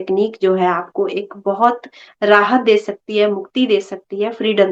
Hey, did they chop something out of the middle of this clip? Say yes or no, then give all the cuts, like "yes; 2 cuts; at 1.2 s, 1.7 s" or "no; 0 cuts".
no; 0 cuts